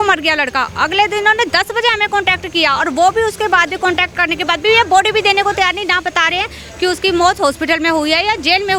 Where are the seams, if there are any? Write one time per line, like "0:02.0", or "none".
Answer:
none